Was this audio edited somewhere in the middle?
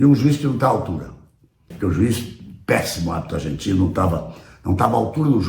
yes; 1 cut; at 1.7 s

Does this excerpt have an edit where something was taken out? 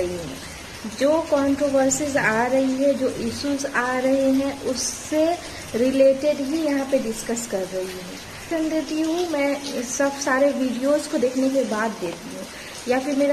yes; 1 cut; at 8.4 s

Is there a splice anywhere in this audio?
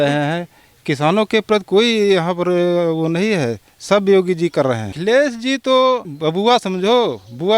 yes; 2 cuts; at 5.0 s, 6.1 s

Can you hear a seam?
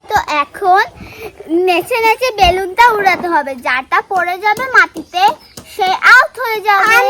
no; 0 cuts

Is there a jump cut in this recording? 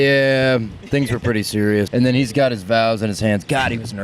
yes; 1 cut; at 1.9 s

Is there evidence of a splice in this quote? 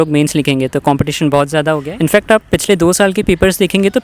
yes; 1 cut; at 1.9 s

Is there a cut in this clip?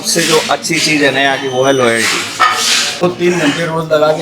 yes; 1 cut; at 2.9 s

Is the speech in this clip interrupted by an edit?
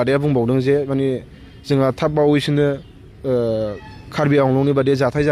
no; 0 cuts

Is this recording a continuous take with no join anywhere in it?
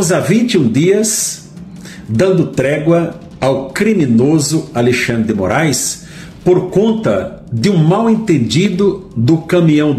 yes; 0 cuts

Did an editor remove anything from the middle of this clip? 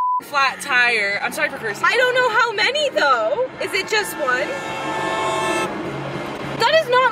no; 0 cuts

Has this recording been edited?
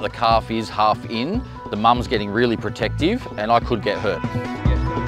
no; 0 cuts

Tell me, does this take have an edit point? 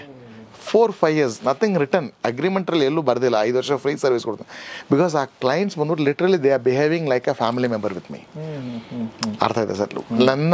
no; 0 cuts

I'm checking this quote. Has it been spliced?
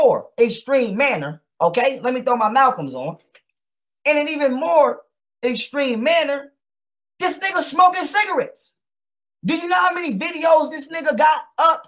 no; 0 cuts

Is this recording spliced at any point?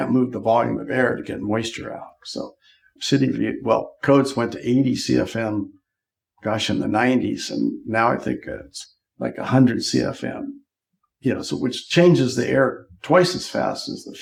no; 0 cuts

